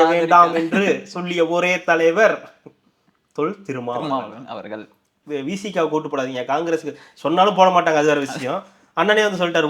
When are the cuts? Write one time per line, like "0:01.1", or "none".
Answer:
0:05.2